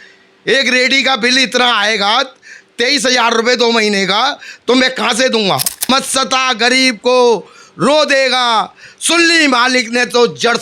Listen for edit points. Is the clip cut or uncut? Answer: cut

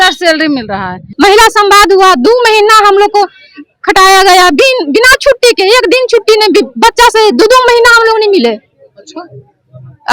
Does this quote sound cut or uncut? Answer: cut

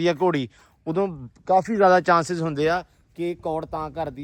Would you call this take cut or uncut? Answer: uncut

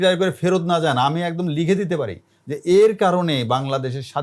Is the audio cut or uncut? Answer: uncut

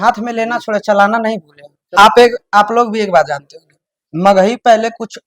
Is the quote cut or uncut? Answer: cut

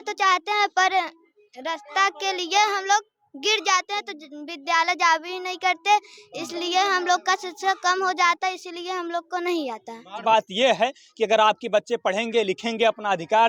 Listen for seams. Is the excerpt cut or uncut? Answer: cut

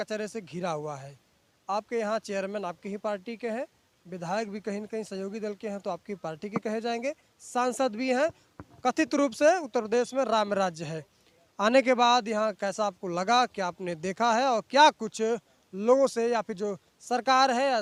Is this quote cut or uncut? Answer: uncut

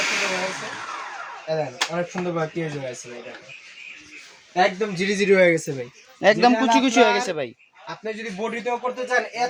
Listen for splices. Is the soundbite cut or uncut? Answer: uncut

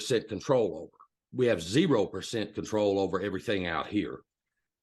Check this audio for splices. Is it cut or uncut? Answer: cut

